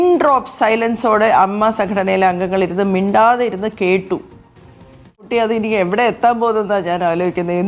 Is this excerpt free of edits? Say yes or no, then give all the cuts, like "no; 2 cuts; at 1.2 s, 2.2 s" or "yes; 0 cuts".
no; 1 cut; at 5.1 s